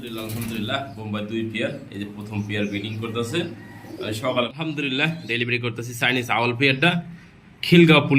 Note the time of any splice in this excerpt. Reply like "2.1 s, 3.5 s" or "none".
4.5 s